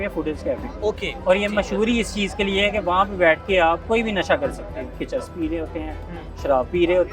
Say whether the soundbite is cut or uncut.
cut